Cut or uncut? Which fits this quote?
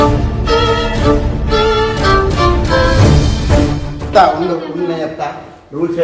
cut